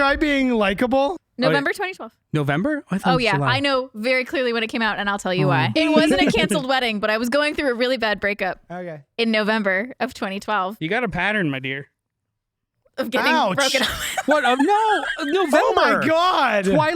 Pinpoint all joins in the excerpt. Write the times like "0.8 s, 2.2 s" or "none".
1.2 s, 5.7 s